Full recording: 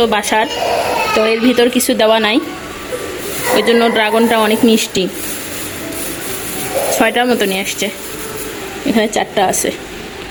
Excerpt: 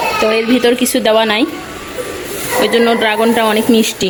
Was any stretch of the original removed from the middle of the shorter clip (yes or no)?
no